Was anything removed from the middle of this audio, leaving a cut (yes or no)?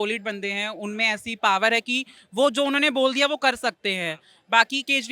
no